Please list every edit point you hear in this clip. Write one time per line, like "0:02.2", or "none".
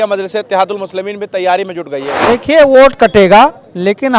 0:02.1